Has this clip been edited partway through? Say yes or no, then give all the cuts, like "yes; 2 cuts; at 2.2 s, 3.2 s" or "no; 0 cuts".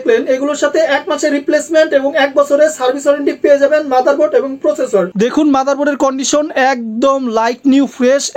yes; 1 cut; at 5.1 s